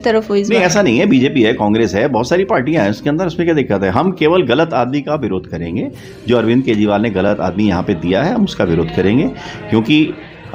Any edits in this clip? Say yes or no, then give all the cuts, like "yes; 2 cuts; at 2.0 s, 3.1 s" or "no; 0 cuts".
no; 0 cuts